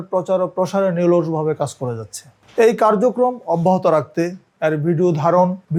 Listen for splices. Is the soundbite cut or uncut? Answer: uncut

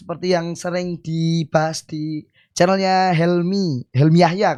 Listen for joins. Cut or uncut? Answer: uncut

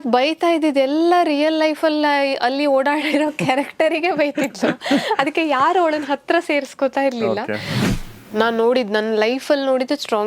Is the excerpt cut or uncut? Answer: cut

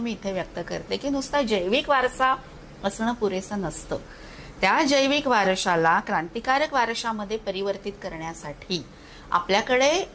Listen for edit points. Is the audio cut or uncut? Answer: uncut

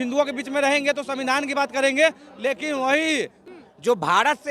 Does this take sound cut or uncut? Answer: cut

